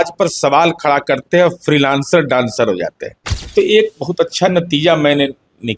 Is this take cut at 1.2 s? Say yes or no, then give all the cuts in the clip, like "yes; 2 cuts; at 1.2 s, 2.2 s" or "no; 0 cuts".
no; 1 cut; at 3.5 s